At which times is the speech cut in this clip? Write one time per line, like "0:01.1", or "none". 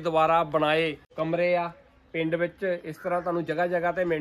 0:01.0